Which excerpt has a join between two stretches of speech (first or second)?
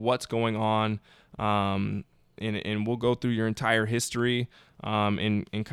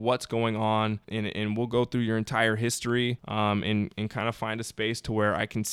second